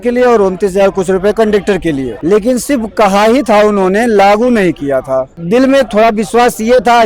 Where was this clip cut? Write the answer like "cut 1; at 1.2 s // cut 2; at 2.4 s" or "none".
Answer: cut 1; at 2.1 s // cut 2; at 5.3 s